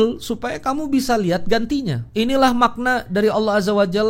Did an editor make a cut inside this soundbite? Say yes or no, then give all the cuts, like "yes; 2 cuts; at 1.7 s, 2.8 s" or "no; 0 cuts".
yes; 1 cut; at 2.0 s